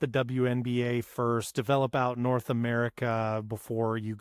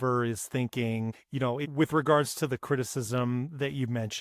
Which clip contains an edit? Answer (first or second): second